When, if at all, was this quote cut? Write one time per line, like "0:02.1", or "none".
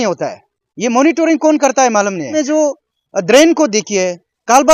0:02.4